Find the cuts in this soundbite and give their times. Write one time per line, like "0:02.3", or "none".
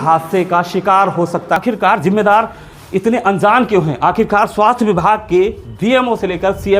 0:01.6